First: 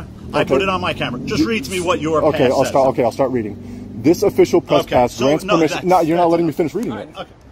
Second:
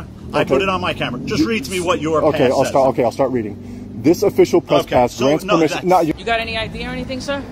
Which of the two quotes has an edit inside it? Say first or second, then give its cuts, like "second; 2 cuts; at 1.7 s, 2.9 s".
second; 1 cut; at 6.1 s